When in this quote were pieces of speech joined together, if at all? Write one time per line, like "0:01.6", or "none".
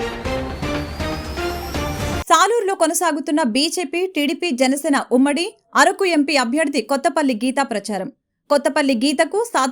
0:01.7